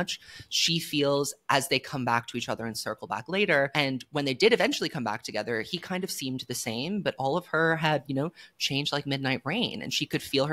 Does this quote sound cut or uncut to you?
cut